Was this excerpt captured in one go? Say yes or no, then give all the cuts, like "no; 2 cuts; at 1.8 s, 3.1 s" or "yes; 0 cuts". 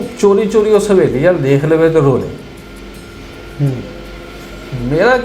yes; 0 cuts